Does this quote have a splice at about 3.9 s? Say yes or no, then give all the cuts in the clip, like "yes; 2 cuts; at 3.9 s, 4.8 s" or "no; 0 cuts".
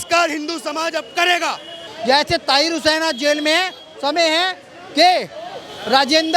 no; 1 cut; at 1.8 s